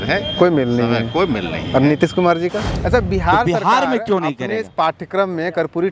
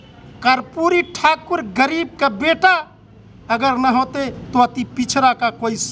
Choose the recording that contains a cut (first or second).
first